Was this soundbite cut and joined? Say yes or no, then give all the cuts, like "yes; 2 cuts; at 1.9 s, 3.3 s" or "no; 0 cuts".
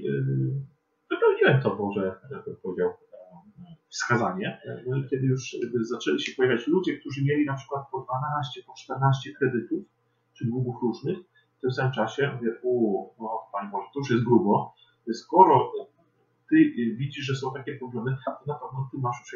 yes; 1 cut; at 4.7 s